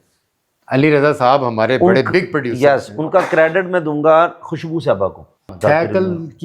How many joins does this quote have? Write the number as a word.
one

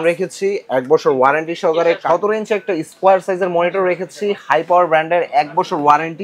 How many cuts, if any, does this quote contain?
one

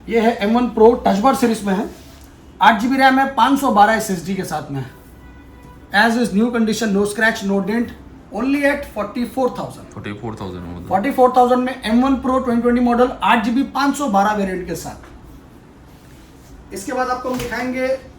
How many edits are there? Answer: zero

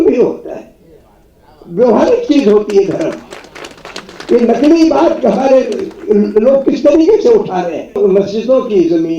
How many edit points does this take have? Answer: one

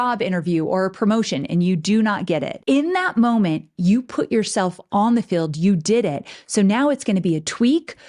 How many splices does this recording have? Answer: one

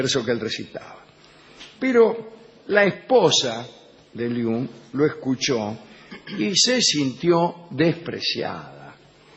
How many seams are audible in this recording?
one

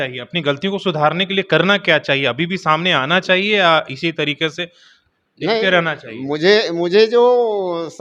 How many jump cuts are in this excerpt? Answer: zero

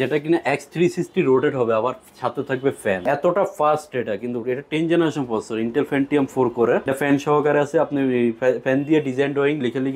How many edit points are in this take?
two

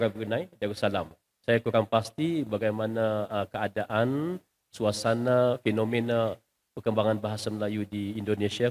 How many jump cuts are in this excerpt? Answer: zero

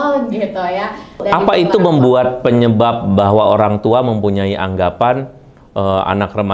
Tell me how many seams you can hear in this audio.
one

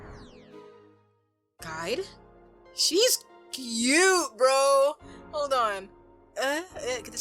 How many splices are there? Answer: zero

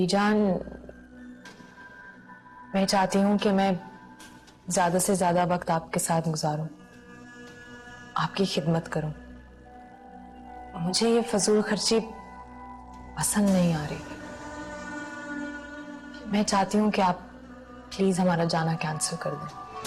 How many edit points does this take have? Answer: zero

